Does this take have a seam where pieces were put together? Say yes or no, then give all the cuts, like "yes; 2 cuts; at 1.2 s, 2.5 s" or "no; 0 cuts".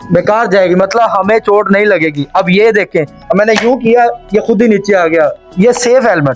yes; 1 cut; at 5.4 s